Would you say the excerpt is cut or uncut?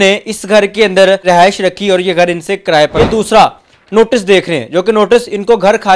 cut